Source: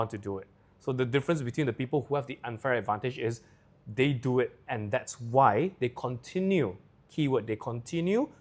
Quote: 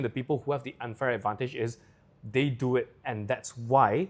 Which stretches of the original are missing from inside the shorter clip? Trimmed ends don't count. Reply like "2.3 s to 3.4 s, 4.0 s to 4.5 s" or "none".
none